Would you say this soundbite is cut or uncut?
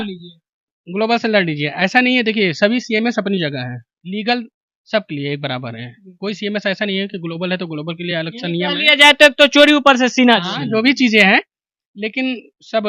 uncut